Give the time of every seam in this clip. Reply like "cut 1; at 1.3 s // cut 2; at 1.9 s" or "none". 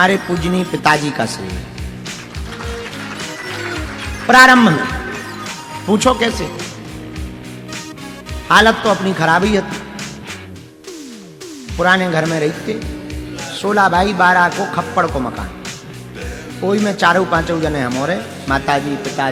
none